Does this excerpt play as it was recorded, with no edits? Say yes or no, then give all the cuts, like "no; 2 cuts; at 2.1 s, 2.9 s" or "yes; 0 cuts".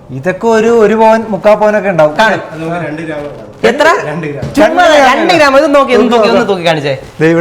yes; 0 cuts